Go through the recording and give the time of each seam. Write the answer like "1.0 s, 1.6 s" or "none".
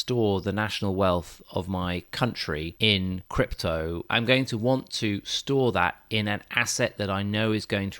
4.1 s